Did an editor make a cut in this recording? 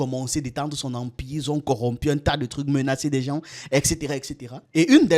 no; 0 cuts

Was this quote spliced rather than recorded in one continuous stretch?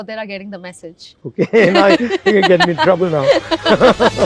no; 0 cuts

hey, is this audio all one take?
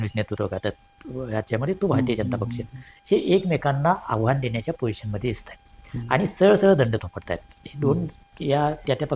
yes; 0 cuts

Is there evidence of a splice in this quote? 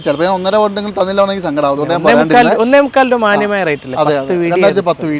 no; 0 cuts

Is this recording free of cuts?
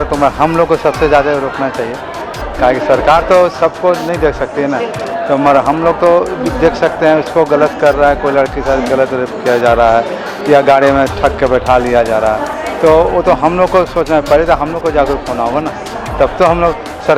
yes; 0 cuts

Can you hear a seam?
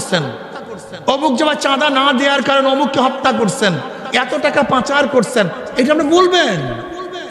no; 0 cuts

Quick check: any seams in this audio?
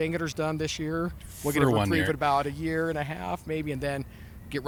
no; 0 cuts

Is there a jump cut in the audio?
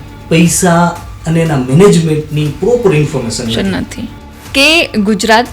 yes; 1 cut; at 4.1 s

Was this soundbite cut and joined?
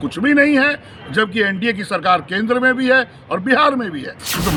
no; 0 cuts

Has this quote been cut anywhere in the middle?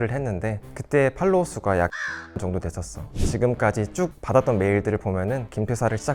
yes; 1 cut; at 3.1 s

